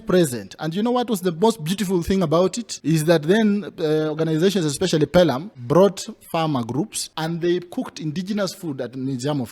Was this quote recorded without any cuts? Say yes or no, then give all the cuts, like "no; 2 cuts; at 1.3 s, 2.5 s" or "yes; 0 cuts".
no; 3 cuts; at 2.7 s, 5.5 s, 7.0 s